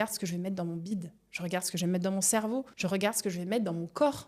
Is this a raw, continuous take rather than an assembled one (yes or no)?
no